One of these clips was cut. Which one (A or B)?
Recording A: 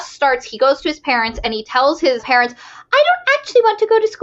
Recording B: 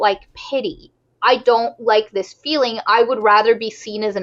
A